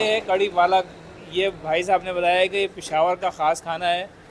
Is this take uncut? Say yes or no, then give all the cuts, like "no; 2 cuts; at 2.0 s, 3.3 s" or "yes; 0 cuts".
yes; 0 cuts